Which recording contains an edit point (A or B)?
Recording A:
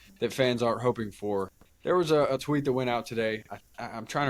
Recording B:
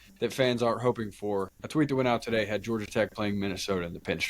B